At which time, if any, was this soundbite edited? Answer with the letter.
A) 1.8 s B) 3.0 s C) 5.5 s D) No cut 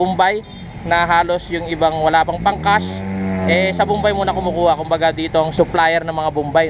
C